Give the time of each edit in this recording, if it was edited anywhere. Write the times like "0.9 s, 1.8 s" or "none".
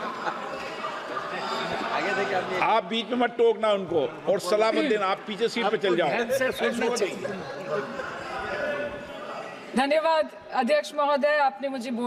none